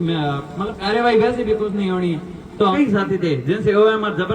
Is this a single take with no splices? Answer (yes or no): no